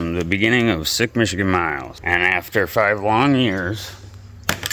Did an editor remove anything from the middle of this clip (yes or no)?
yes